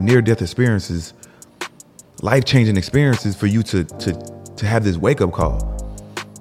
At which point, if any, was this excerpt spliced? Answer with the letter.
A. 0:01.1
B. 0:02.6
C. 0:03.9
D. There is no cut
D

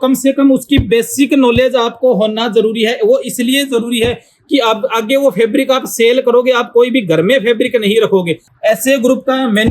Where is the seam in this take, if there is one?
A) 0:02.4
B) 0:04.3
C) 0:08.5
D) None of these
C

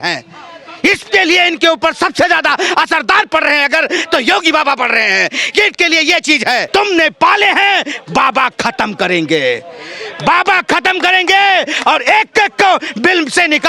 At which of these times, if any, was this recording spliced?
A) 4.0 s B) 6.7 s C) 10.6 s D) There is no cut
B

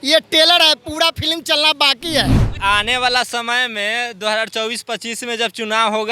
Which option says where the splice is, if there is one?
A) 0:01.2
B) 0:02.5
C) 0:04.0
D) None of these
B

